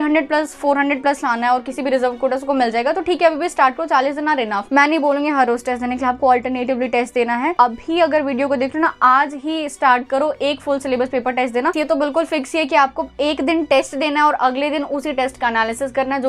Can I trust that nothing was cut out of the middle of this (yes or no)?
no